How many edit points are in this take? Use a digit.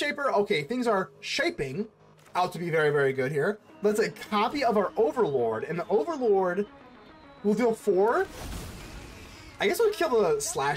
1